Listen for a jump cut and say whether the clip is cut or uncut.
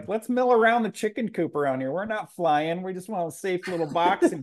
uncut